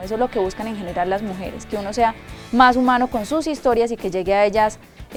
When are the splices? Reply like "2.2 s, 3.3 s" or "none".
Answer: none